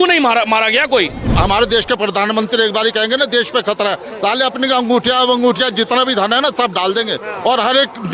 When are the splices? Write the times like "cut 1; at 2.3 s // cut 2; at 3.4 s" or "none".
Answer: cut 1; at 1.2 s